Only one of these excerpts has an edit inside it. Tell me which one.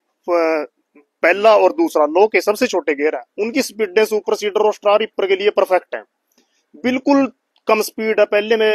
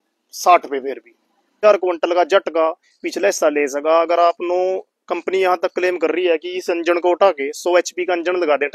second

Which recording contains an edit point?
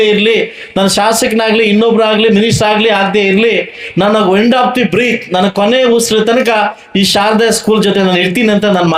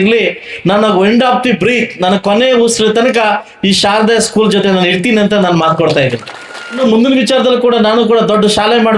second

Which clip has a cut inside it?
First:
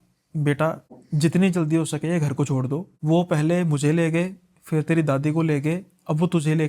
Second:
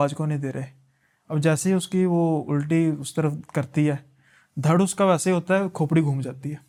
first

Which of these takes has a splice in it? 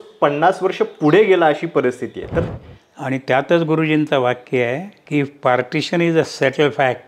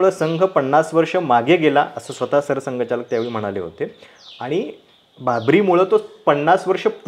first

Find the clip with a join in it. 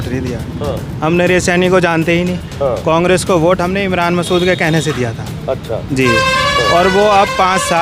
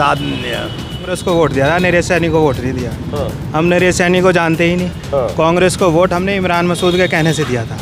second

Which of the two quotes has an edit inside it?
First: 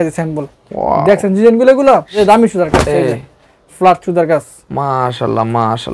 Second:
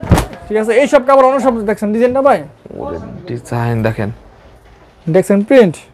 first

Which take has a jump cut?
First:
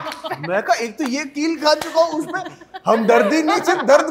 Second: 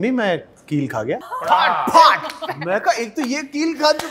second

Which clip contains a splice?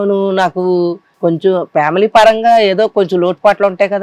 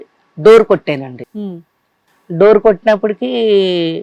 first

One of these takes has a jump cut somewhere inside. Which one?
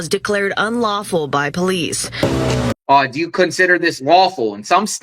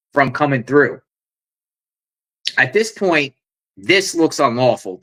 first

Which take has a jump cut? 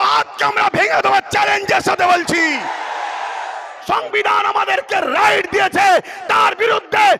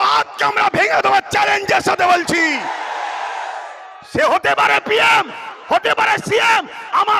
first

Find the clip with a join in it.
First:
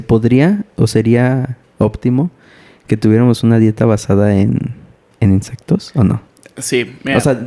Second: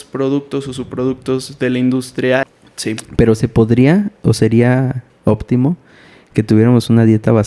second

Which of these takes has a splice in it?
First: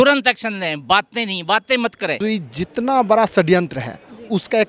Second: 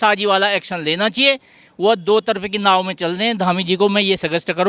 first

